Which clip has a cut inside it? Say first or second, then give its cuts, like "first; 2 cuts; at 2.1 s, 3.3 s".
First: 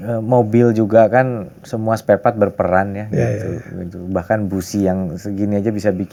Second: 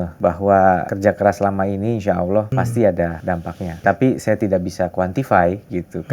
second; 3 cuts; at 0.9 s, 2.5 s, 3.3 s